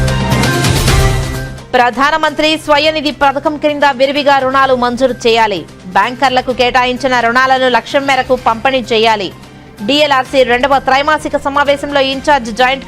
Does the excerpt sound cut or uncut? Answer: cut